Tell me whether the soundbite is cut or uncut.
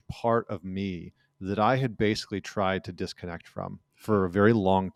uncut